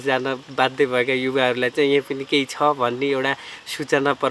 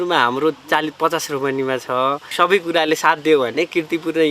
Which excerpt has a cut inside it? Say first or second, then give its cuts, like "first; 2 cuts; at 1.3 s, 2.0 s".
second; 1 cut; at 2.2 s